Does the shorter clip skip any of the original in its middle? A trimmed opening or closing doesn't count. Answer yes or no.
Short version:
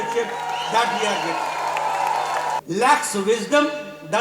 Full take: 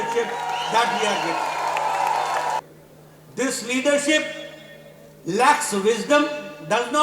yes